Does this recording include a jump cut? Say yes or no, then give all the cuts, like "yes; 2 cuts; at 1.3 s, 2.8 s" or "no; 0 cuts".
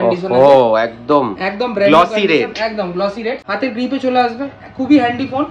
yes; 1 cut; at 3.4 s